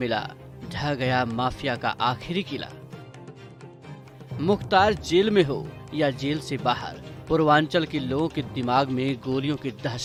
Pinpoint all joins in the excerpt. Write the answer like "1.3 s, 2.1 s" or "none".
none